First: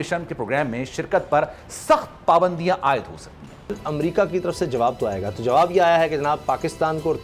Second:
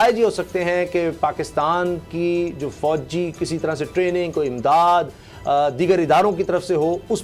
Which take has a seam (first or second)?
first